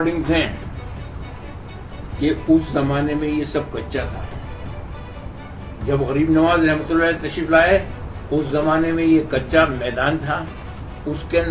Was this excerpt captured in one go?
yes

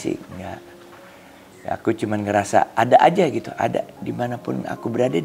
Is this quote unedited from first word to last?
yes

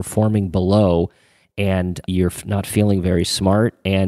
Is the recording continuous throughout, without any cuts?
no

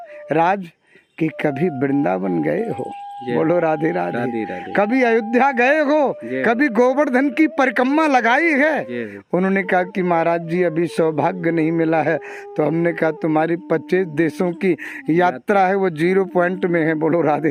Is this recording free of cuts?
yes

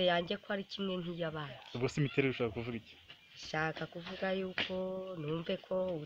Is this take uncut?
yes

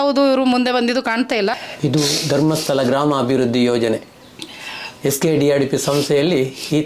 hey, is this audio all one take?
no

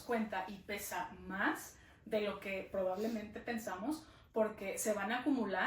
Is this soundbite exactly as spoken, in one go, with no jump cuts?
yes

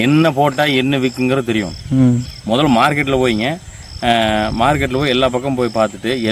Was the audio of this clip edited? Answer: no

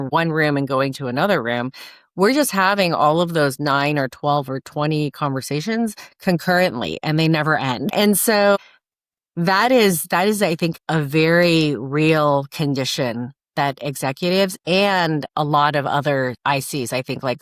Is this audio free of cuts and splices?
no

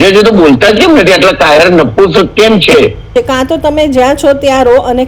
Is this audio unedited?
no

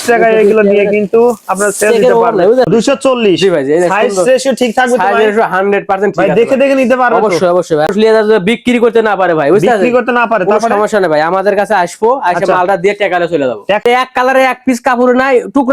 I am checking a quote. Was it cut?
yes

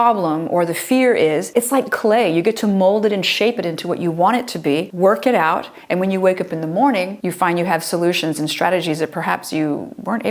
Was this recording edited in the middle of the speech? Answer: yes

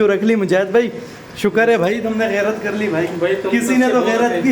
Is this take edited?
no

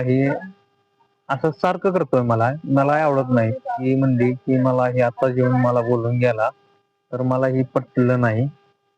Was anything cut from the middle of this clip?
yes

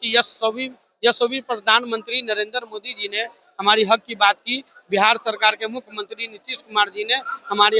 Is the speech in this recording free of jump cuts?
yes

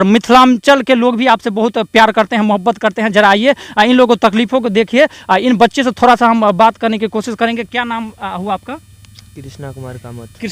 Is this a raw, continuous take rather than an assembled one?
yes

